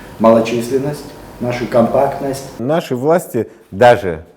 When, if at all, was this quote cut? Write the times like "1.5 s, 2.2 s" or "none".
2.6 s